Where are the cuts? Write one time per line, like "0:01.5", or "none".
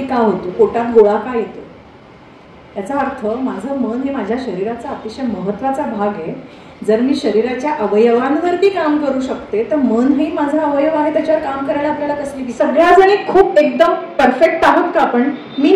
0:12.4